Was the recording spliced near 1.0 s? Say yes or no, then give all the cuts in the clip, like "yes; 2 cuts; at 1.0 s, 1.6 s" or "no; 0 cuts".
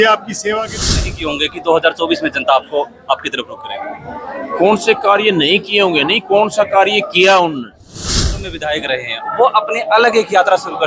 yes; 2 cuts; at 1.0 s, 8.1 s